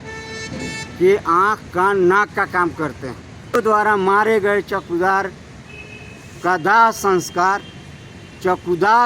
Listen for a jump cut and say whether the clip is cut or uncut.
cut